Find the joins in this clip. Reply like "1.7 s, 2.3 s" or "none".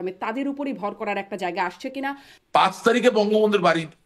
2.3 s